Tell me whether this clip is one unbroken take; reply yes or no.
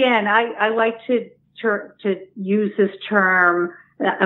yes